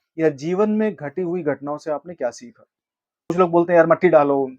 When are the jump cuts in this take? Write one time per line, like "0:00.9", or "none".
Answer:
0:03.3